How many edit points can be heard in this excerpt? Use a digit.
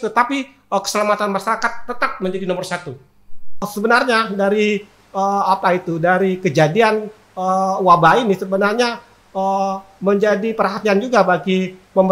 1